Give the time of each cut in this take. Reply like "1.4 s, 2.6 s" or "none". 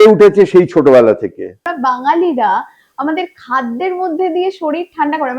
1.6 s

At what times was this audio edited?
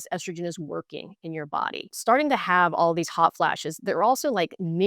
1.9 s

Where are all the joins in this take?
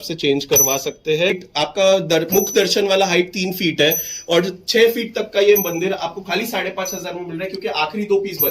1.4 s

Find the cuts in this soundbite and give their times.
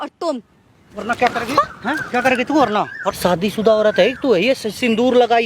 3.0 s

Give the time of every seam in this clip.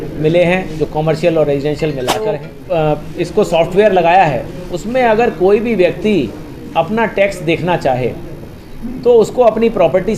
2.5 s

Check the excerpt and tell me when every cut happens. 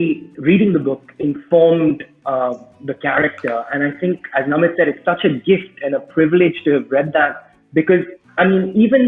none

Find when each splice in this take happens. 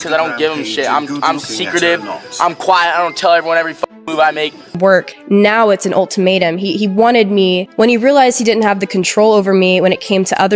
4.8 s

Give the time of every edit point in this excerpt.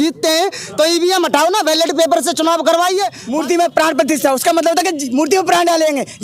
3.2 s

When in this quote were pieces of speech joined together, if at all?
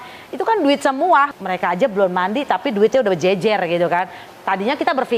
1.3 s, 4.2 s

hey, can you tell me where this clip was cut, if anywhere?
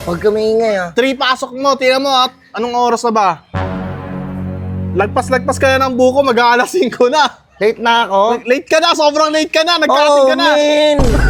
none

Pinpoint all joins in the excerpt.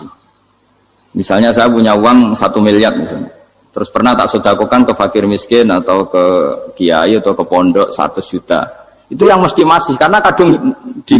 none

